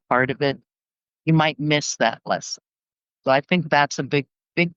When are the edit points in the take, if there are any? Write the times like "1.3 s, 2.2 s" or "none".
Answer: none